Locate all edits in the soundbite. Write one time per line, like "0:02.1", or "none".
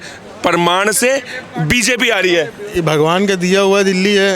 0:02.8